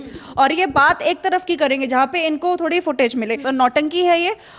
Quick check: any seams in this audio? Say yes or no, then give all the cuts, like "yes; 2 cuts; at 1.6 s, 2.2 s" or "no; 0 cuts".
yes; 1 cut; at 3.4 s